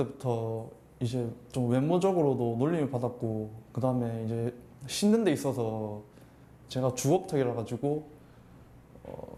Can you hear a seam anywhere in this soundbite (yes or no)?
no